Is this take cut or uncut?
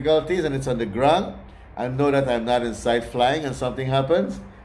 uncut